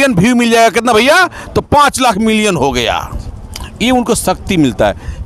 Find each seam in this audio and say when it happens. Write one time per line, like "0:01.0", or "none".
none

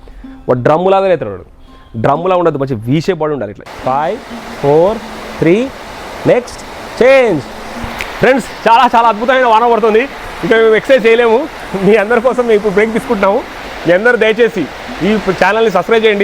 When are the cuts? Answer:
0:03.6

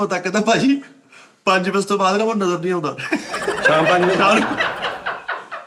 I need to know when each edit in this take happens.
none

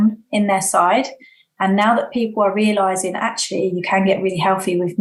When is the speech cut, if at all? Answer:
none

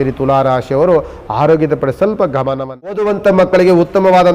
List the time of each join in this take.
0:03.0

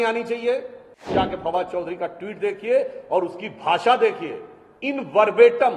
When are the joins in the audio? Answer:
0:01.1

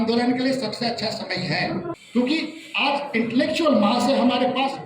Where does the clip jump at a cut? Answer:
0:01.9

